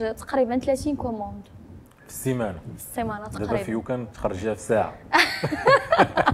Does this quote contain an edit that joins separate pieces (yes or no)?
no